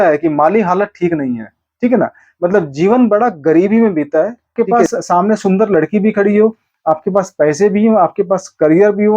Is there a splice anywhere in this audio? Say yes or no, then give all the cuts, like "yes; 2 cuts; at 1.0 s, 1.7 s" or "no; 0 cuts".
yes; 1 cut; at 4.6 s